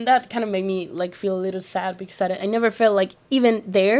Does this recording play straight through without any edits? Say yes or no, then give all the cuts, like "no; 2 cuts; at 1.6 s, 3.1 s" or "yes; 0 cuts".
yes; 0 cuts